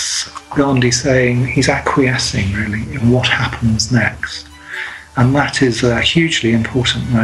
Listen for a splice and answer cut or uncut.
uncut